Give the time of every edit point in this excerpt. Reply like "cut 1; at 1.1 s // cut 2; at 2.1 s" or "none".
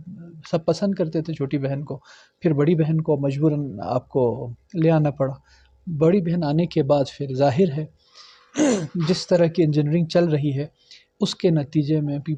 none